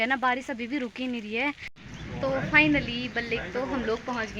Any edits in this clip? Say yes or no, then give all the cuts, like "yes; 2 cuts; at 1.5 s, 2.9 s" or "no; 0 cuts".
yes; 1 cut; at 1.7 s